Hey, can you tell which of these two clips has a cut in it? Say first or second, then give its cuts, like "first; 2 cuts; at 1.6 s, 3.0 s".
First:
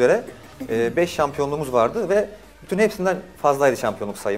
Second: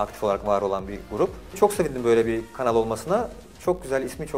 second; 1 cut; at 1.6 s